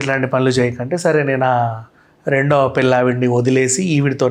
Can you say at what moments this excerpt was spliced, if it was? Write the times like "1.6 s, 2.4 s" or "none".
none